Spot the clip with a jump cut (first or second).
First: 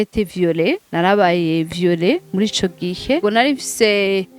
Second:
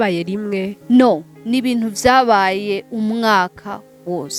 first